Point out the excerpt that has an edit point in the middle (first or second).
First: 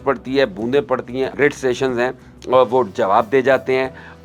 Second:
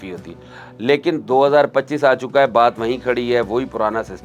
first